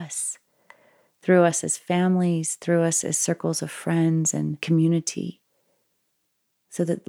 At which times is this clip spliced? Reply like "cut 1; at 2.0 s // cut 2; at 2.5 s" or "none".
cut 1; at 4.6 s